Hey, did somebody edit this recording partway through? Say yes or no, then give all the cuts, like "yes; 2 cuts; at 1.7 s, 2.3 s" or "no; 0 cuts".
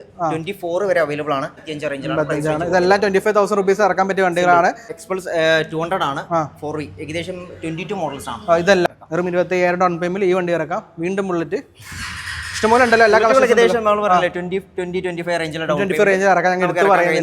yes; 3 cuts; at 1.6 s, 5.0 s, 8.9 s